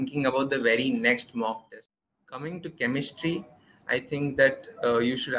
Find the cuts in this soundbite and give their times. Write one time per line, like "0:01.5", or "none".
0:01.6